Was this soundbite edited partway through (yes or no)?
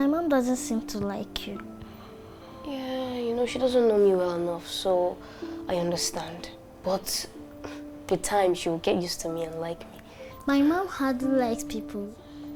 no